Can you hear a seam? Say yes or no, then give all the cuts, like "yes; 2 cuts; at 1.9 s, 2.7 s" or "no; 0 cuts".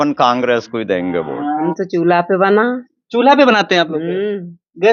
yes; 1 cut; at 1.7 s